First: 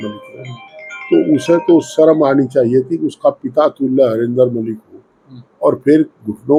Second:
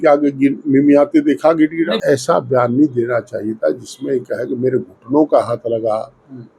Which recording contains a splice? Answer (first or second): second